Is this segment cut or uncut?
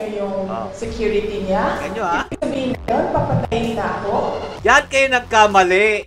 cut